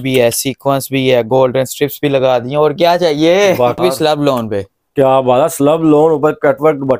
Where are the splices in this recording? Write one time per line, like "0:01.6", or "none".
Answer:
0:03.8

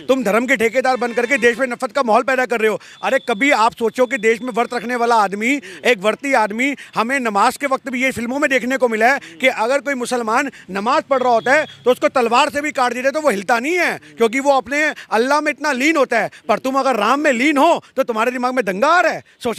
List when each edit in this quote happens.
none

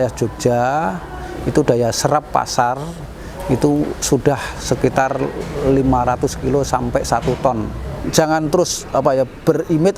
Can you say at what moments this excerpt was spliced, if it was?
0:08.1

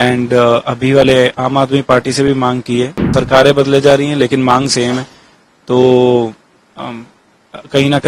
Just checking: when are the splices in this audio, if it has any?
0:03.0

